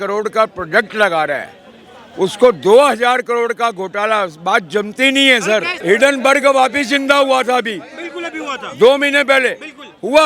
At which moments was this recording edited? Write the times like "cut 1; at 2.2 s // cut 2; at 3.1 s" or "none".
cut 1; at 5.7 s